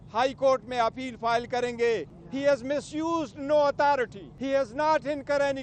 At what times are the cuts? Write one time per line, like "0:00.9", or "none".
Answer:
0:02.2
0:04.3